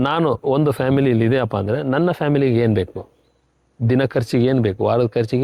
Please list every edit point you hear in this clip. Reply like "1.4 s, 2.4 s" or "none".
none